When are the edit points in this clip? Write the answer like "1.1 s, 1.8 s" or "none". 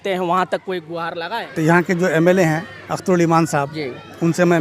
1.6 s